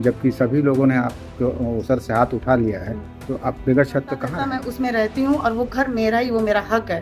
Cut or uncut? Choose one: cut